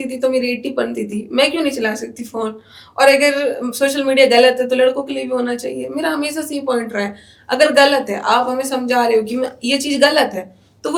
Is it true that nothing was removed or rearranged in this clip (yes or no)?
yes